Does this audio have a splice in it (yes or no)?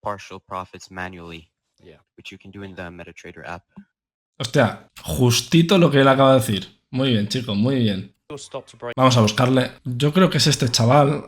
yes